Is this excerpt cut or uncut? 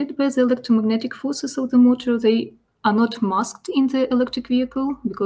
uncut